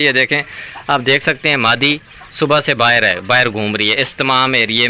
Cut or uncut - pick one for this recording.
uncut